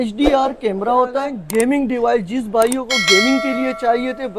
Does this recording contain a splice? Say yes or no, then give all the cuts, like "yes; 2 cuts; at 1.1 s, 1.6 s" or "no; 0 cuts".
yes; 1 cut; at 1.4 s